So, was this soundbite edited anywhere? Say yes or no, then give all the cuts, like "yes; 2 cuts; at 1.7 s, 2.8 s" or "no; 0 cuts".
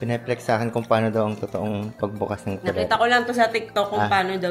no; 0 cuts